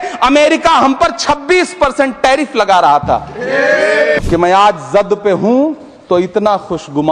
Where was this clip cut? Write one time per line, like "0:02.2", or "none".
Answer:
0:04.2

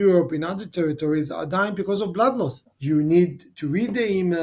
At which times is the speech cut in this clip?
0:02.7

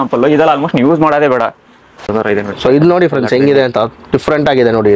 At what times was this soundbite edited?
0:02.1

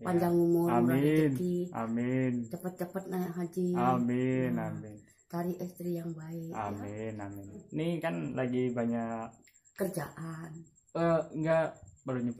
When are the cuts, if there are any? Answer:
0:07.6

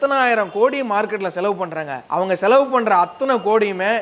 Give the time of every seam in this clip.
none

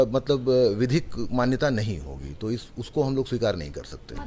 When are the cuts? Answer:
none

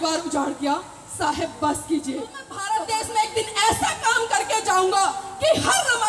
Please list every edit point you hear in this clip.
0:02.5

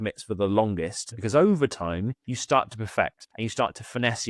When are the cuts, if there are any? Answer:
0:01.2
0:02.3
0:03.2

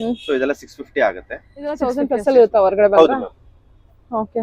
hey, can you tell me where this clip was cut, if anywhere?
0:01.8

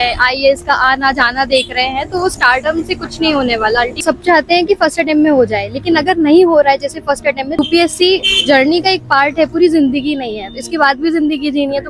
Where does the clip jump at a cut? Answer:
0:04.0
0:07.6

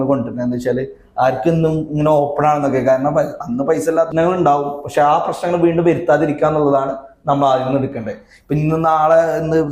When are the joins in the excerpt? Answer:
0:04.1

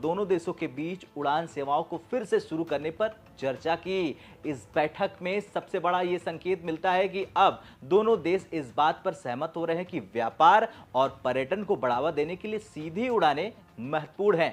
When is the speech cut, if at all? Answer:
none

